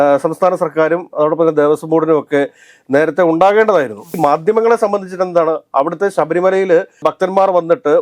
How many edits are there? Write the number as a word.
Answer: one